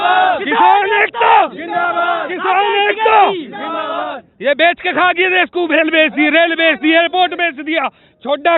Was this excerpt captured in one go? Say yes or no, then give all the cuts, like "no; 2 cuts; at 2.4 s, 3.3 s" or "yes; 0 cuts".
yes; 0 cuts